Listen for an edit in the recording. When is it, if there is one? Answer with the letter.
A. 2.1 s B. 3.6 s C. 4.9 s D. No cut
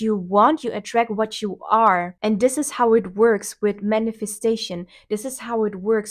D